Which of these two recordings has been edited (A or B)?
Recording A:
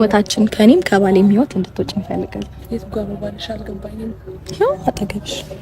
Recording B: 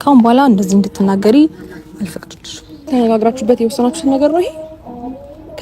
B